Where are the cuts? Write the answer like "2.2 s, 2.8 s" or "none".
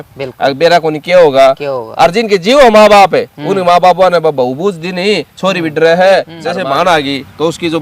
6.4 s